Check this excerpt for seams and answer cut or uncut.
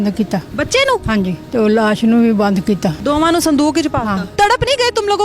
cut